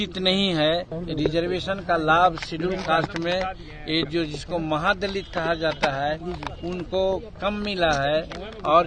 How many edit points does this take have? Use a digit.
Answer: 1